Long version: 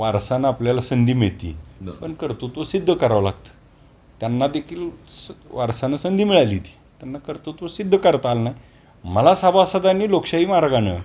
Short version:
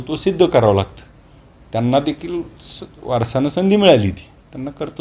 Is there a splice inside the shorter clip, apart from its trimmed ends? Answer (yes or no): no